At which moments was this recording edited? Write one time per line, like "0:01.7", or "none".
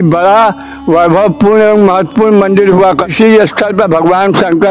0:03.1